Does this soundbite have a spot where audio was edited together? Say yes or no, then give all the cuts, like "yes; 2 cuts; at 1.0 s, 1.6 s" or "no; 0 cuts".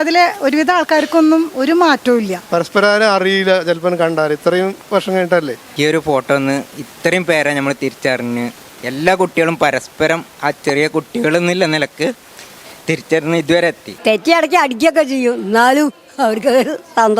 yes; 3 cuts; at 2.4 s, 5.6 s, 13.9 s